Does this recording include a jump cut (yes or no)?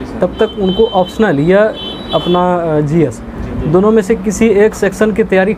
no